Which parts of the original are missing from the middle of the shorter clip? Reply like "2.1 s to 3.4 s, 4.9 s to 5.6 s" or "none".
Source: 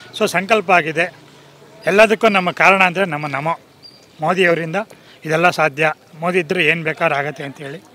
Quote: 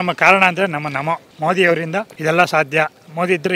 3.7 s to 4.1 s, 4.9 s to 5.2 s